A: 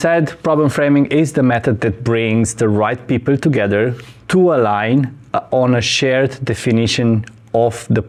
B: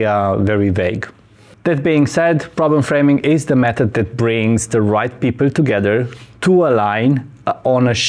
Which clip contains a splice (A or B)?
B